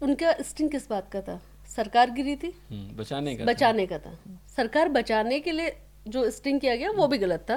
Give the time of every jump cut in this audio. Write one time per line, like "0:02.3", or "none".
none